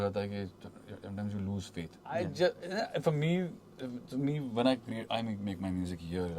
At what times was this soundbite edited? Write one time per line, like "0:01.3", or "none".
0:02.1